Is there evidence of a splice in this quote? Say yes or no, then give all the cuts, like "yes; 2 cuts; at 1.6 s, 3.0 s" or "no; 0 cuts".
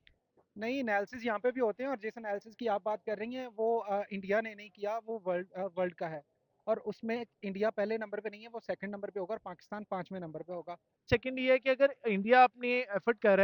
yes; 1 cut; at 11.1 s